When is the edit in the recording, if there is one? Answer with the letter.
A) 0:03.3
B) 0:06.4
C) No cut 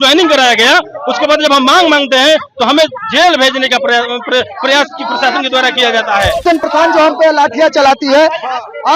B